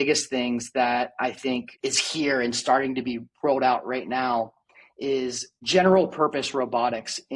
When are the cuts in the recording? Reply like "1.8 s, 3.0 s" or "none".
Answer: none